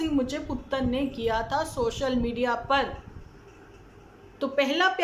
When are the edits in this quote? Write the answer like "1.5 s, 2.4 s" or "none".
none